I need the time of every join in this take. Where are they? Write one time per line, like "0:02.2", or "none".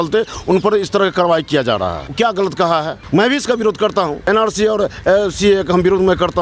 0:02.0
0:03.0
0:04.2